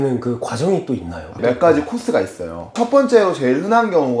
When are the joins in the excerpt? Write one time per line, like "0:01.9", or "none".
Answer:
0:01.4